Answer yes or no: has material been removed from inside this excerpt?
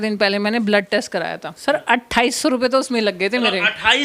yes